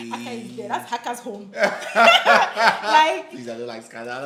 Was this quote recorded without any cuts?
yes; 0 cuts

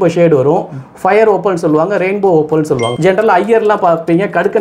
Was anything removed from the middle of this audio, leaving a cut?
yes; 1 cut; at 2.9 s

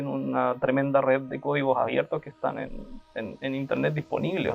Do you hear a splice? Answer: no; 0 cuts

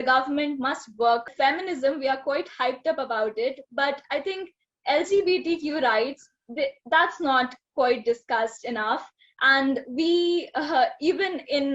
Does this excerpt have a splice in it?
yes; 1 cut; at 1.3 s

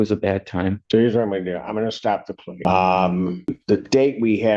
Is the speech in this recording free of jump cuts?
no; 3 cuts; at 0.8 s, 2.4 s, 3.6 s

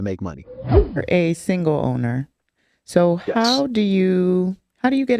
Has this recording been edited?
yes; 1 cut; at 1.0 s

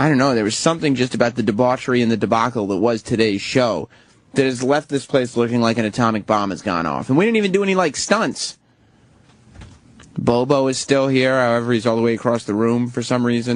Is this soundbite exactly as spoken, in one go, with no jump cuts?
no; 1 cut; at 7.5 s

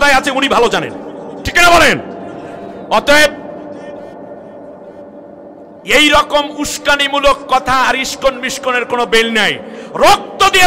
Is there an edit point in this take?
no; 0 cuts

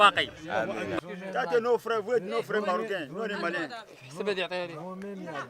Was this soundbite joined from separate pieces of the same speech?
yes; 1 cut; at 1.0 s

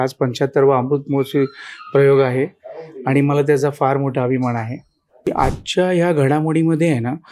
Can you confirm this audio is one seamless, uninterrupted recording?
no; 1 cut; at 5.3 s

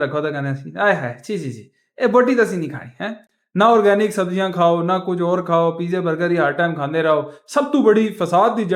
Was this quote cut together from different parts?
no; 0 cuts

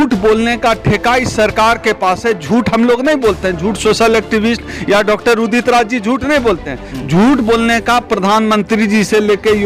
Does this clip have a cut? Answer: no; 0 cuts

